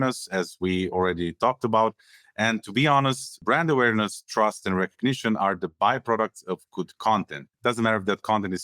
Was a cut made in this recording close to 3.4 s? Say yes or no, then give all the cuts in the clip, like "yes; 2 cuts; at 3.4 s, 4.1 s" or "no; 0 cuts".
yes; 2 cuts; at 3.4 s, 7.4 s